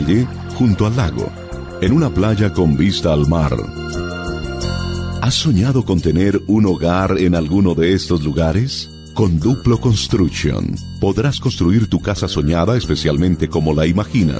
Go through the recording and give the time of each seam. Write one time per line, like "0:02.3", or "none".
none